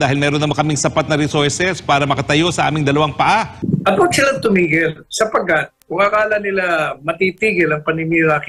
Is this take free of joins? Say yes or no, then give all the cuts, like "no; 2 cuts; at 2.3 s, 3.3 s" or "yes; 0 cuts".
no; 1 cut; at 3.6 s